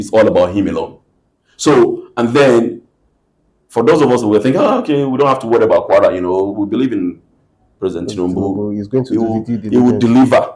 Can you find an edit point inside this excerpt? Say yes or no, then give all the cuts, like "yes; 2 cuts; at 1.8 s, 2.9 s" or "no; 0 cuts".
no; 0 cuts